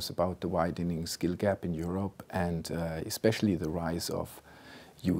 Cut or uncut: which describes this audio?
uncut